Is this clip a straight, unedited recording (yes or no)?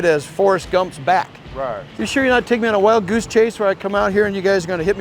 no